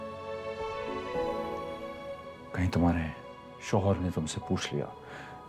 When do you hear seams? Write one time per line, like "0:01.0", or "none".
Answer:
none